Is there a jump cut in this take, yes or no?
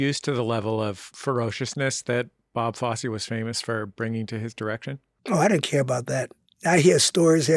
yes